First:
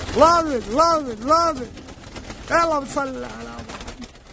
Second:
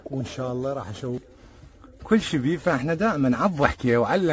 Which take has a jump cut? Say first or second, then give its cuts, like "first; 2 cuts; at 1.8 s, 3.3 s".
second; 1 cut; at 1.3 s